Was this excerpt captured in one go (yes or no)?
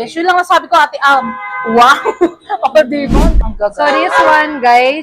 no